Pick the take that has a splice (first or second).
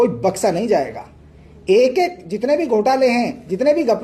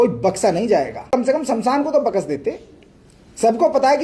second